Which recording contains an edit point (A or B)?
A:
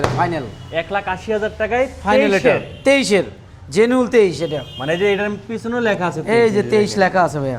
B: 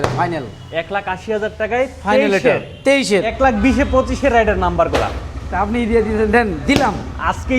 B